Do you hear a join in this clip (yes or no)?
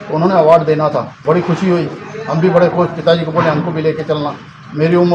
yes